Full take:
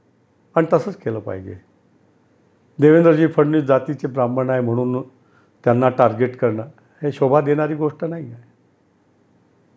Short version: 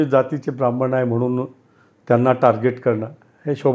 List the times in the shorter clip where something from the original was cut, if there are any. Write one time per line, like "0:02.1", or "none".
none